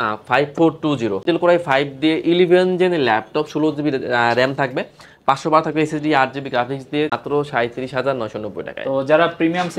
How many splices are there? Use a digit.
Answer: 2